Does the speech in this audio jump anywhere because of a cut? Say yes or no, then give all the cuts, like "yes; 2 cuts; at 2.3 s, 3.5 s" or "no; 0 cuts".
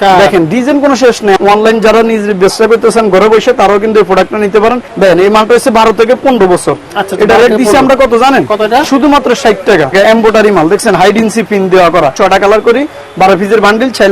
yes; 4 cuts; at 1.4 s, 4.9 s, 9.9 s, 12.1 s